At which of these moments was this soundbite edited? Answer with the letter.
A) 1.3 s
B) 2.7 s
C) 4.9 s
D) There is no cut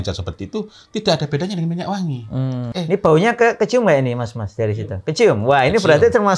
B